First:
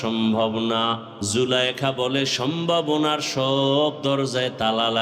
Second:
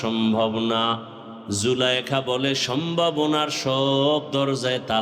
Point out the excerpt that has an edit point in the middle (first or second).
first